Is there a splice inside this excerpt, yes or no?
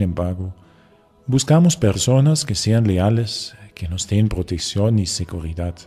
yes